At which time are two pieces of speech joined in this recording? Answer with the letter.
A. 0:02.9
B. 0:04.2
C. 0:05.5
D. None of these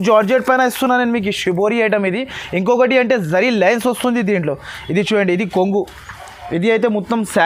D